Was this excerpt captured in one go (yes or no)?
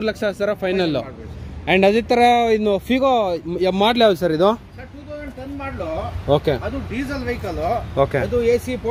yes